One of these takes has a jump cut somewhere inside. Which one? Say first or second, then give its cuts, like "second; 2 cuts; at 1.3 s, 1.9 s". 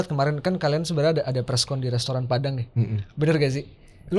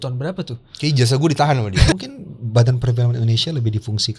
second; 1 cut; at 1.9 s